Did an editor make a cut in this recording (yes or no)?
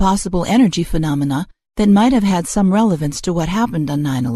no